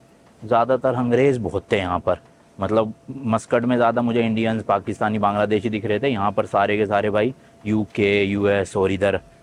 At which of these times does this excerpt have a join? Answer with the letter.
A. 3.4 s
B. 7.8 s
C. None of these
C